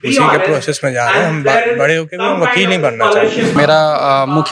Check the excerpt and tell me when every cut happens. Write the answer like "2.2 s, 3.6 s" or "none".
3.5 s